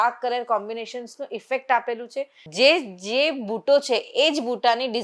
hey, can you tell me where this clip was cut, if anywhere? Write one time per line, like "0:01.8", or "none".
0:02.4

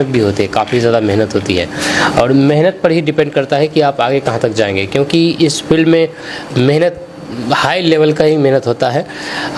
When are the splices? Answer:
none

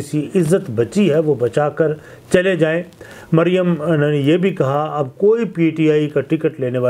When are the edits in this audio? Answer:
none

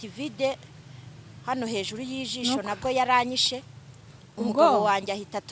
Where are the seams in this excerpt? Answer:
none

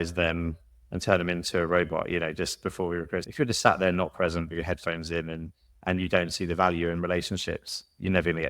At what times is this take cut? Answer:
0:03.2

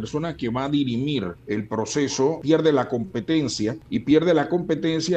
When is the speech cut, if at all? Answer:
0:01.4
0:02.4
0:03.8

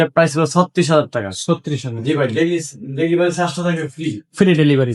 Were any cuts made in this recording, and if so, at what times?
none

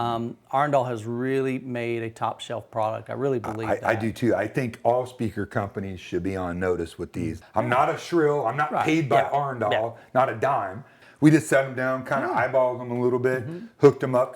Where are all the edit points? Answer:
0:07.4
0:11.0

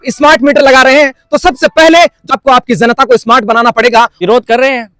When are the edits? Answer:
0:02.4
0:04.2

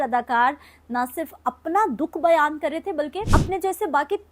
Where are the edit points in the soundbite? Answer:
0:03.2

